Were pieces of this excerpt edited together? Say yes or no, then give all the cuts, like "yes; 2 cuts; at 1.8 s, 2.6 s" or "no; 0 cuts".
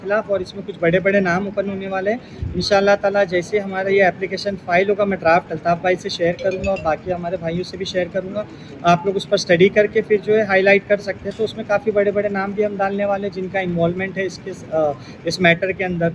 no; 0 cuts